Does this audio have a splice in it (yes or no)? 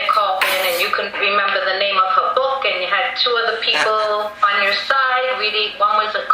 yes